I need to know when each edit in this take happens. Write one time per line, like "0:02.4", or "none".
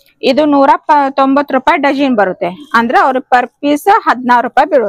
none